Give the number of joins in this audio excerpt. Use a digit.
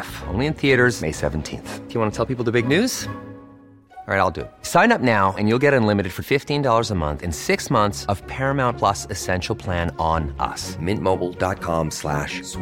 0